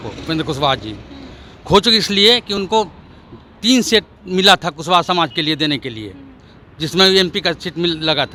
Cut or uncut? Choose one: uncut